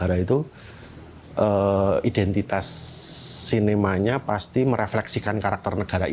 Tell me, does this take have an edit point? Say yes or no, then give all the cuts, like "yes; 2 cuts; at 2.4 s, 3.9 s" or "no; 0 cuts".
no; 0 cuts